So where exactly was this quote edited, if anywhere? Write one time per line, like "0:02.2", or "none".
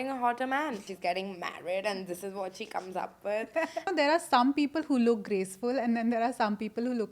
0:00.9
0:03.9